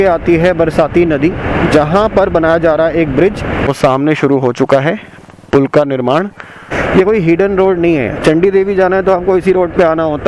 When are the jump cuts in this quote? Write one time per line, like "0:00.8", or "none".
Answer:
0:03.6
0:06.7